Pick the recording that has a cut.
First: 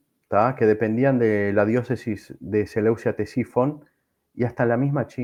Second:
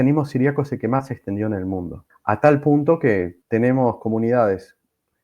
second; 2 cuts; at 2.1 s, 3.4 s

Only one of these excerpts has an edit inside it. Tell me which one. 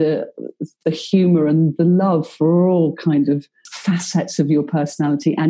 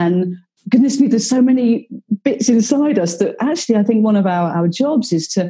first; 1 cut; at 3.7 s

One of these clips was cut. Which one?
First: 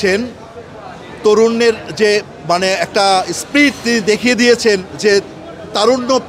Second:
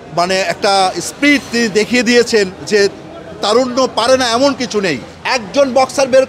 second; 1 cut; at 5.1 s

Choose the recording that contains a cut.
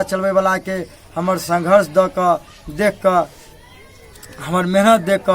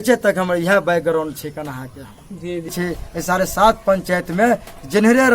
second; 1 cut; at 2.7 s

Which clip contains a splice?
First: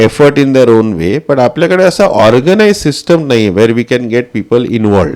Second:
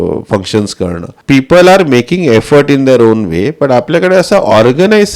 second; 1 cut; at 1.1 s

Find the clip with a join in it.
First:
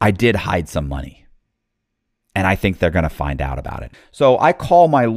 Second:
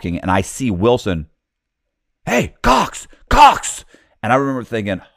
first; 1 cut; at 3.8 s

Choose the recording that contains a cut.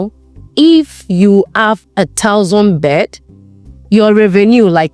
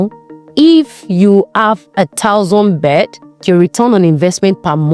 second; 1 cut; at 3.4 s

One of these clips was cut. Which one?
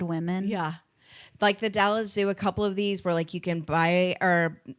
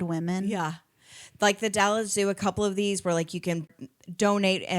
second; 1 cut; at 3.7 s

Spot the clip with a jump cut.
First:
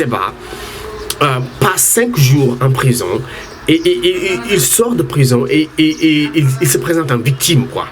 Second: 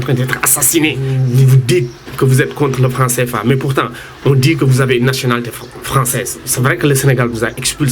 second; 2 cuts; at 1.2 s, 6.4 s

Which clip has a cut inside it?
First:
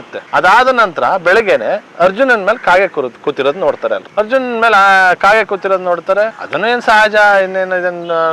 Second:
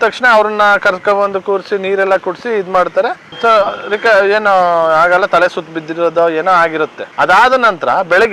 first; 1 cut; at 4.1 s

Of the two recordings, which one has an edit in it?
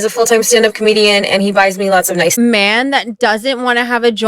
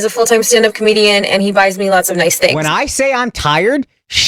first; 1 cut; at 2.3 s

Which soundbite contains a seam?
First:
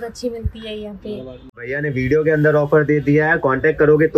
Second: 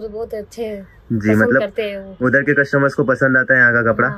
first; 1 cut; at 1.8 s

